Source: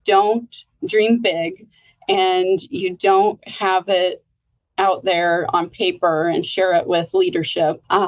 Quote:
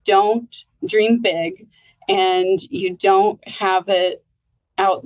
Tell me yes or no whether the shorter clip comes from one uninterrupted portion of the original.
yes